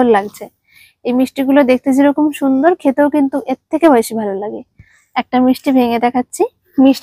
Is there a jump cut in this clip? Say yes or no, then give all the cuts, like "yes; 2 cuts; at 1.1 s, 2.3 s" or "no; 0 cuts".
no; 0 cuts